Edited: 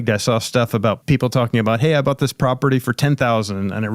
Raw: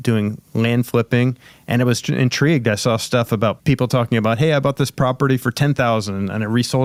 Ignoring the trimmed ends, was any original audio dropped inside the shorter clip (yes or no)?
no